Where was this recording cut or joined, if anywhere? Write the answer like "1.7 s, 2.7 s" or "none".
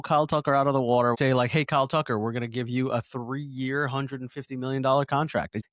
1.2 s